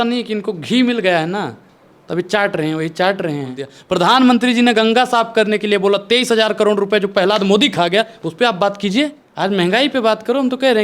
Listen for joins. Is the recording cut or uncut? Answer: cut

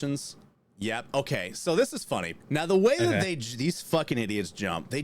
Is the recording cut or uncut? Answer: cut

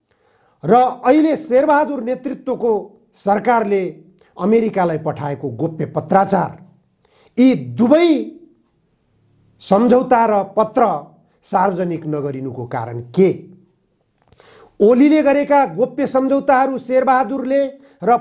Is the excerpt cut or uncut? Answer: uncut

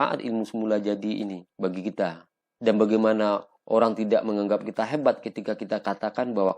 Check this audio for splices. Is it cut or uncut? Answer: cut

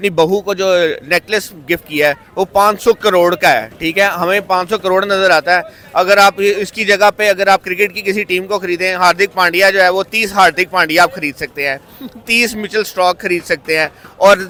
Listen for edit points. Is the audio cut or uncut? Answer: uncut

